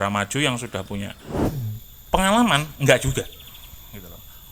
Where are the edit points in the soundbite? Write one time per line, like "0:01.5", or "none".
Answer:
0:01.3